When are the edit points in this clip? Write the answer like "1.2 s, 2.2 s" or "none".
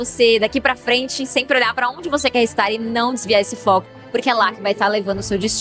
none